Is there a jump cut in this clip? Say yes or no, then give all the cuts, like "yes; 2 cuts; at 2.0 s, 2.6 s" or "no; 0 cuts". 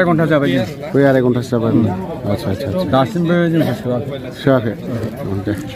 no; 0 cuts